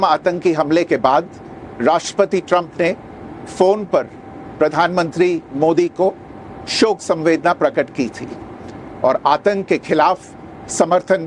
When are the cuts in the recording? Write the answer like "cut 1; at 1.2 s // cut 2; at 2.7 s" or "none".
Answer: cut 1; at 2.9 s